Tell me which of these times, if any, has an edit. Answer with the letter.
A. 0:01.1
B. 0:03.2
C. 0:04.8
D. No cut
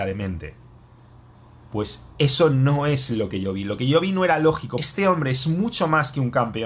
C